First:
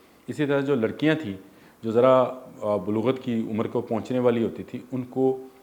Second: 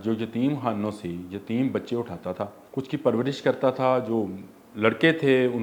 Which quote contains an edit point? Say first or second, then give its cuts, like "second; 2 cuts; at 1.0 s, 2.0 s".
second; 1 cut; at 2.6 s